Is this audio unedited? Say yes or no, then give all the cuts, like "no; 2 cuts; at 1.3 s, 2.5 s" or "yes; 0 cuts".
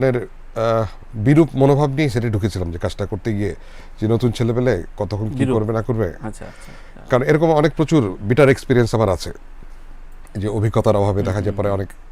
yes; 0 cuts